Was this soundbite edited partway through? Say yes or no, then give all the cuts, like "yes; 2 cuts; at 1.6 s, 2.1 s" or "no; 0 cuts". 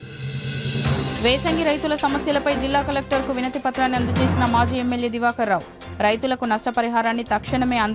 yes; 1 cut; at 1.1 s